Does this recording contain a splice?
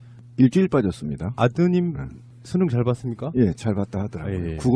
no; 0 cuts

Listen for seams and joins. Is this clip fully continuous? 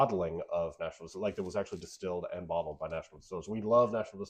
yes; 0 cuts

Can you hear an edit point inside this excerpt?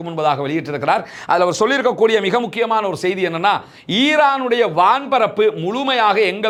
no; 0 cuts

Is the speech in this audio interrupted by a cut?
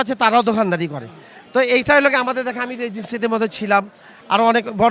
no; 0 cuts

